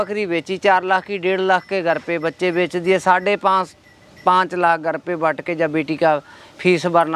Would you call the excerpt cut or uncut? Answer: uncut